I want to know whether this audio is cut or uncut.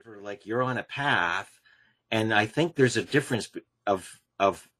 uncut